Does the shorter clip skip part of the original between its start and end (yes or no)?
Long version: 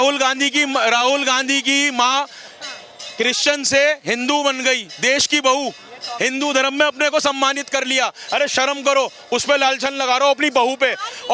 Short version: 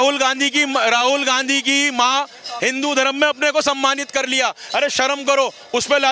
yes